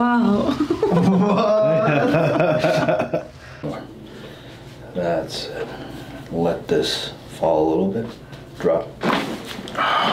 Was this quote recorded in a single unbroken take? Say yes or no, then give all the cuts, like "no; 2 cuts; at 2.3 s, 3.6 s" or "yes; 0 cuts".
yes; 0 cuts